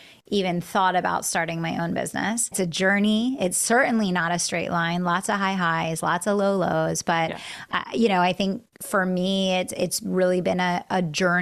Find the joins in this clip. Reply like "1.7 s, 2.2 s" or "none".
2.5 s